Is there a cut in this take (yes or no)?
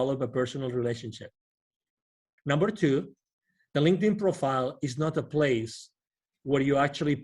yes